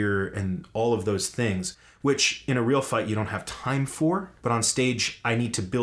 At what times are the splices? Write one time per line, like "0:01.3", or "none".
0:04.3